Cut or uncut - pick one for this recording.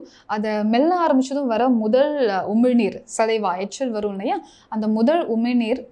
uncut